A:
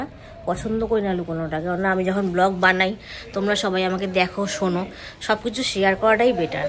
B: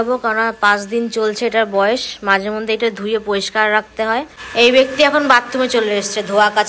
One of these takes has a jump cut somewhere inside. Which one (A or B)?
B